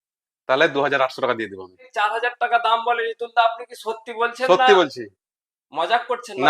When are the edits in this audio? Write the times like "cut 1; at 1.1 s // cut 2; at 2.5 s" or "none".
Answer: cut 1; at 1.9 s